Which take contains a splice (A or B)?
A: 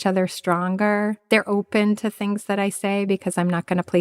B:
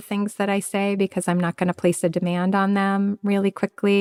A